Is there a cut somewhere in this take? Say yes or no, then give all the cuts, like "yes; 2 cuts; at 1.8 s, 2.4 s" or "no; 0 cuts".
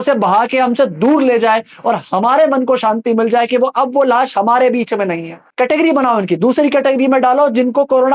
yes; 1 cut; at 5.5 s